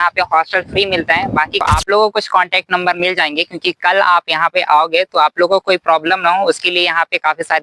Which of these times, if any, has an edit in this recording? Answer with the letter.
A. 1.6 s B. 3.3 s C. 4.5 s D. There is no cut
A